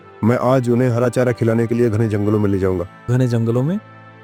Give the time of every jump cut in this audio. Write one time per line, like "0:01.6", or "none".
none